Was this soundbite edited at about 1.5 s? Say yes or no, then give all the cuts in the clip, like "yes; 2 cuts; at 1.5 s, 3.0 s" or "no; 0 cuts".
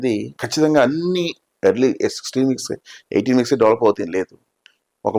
no; 0 cuts